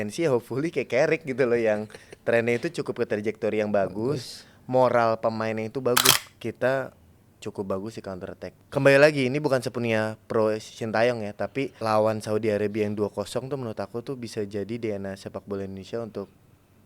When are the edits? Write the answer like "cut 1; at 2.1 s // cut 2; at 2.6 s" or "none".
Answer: cut 1; at 6.2 s // cut 2; at 8.4 s // cut 3; at 11.7 s